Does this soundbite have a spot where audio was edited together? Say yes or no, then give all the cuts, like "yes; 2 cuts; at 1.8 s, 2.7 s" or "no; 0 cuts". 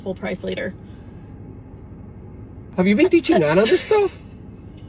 no; 0 cuts